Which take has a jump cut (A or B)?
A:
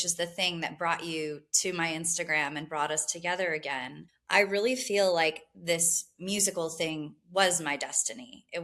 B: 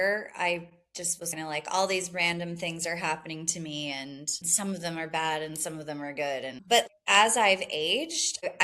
B